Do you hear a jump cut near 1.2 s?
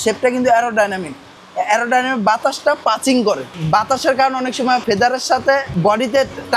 no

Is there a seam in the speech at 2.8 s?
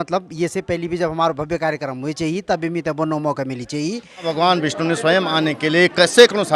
no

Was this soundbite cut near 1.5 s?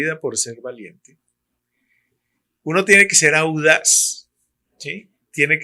no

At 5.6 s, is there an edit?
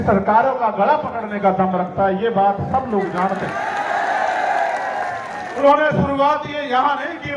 yes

